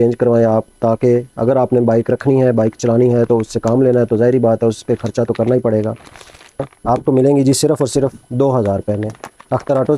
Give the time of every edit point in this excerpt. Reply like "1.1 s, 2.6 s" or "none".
6.7 s